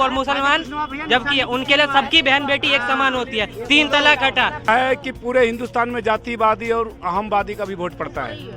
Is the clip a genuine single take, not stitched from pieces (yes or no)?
no